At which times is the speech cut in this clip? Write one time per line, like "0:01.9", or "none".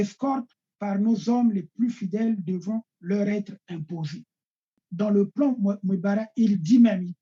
0:04.9